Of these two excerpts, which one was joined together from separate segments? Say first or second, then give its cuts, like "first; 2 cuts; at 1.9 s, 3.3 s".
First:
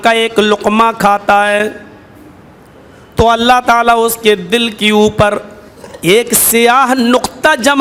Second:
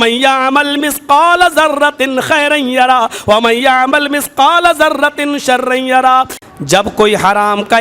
second; 1 cut; at 6.4 s